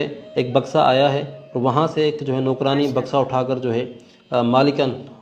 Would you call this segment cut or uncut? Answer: uncut